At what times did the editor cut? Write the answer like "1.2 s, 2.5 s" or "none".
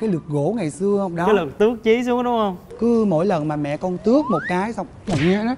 none